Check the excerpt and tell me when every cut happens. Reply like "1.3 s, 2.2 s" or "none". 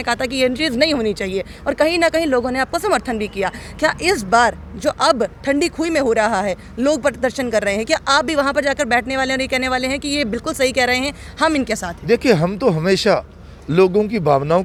none

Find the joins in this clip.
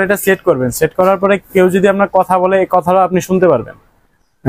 none

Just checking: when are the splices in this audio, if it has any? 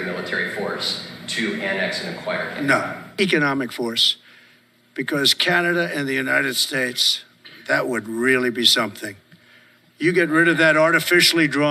none

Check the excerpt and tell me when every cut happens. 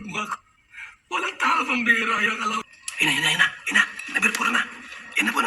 2.6 s

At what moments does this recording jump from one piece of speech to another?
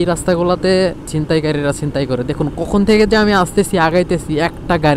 1.1 s

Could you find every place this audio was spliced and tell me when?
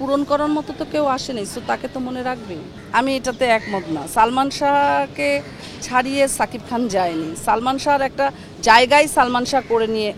none

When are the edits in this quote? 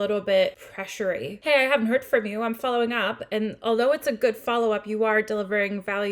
1.2 s

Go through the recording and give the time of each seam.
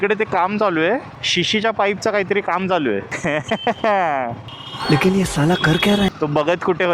2.8 s, 6.0 s

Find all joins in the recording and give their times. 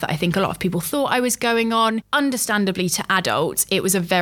2.1 s

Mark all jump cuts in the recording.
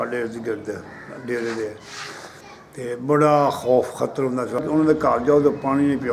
4.6 s

